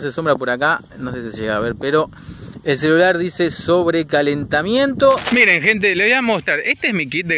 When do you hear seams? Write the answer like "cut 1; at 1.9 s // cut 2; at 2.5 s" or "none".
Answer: cut 1; at 5.2 s